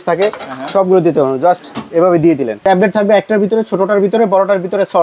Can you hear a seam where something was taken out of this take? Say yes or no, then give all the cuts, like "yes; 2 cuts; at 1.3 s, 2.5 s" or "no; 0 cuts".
yes; 1 cut; at 2.6 s